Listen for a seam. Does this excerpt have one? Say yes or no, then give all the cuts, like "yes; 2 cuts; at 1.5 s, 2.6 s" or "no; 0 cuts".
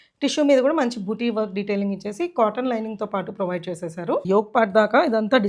yes; 1 cut; at 4.2 s